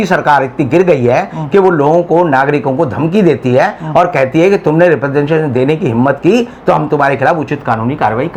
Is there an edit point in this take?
no; 0 cuts

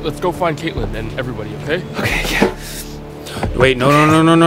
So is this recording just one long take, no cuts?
yes; 0 cuts

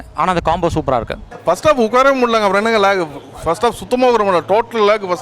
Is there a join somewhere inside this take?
yes; 1 cut; at 1.2 s

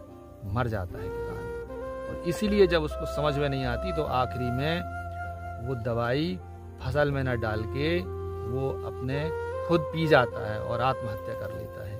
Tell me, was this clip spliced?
no; 0 cuts

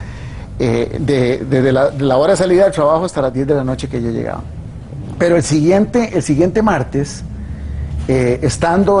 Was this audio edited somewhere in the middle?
no; 0 cuts

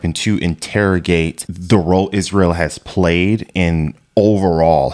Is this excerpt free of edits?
yes; 0 cuts

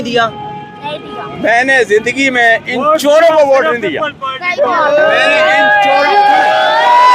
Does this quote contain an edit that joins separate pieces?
no; 0 cuts

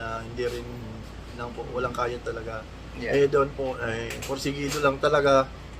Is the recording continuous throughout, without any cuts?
no; 1 cut; at 1.3 s

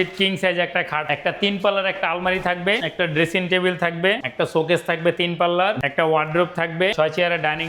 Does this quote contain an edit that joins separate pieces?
yes; 5 cuts; at 1.0 s, 2.8 s, 4.2 s, 5.8 s, 6.9 s

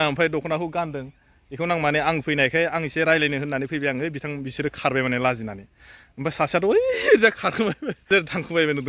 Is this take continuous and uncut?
yes; 0 cuts

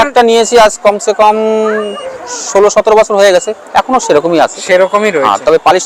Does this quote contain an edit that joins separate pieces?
no; 0 cuts

